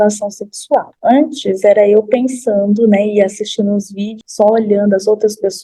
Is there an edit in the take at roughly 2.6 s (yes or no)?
no